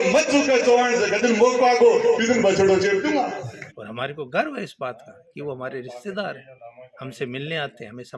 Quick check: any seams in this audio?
no; 0 cuts

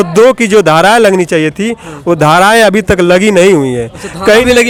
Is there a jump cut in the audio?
no; 0 cuts

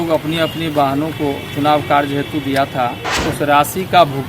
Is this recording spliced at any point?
yes; 1 cut; at 3.1 s

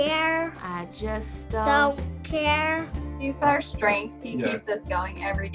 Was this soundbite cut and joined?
yes; 1 cut; at 3.2 s

